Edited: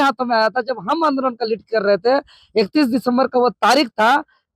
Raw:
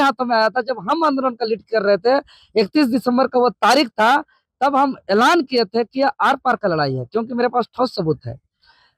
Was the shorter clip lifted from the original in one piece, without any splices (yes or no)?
yes